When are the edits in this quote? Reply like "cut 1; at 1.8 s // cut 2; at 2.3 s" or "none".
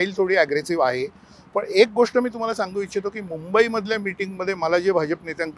none